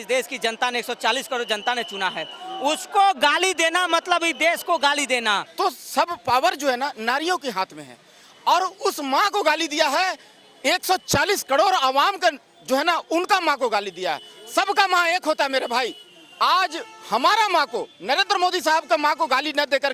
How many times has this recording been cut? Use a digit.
1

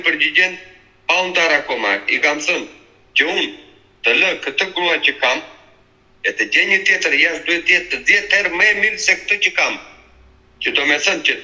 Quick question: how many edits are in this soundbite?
0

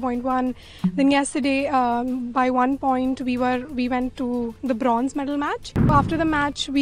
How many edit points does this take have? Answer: 1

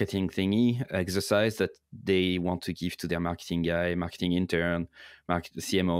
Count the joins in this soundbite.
0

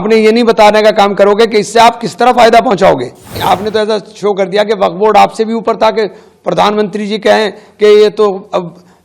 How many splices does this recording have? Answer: 1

